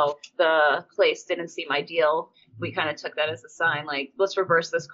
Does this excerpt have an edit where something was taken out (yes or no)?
yes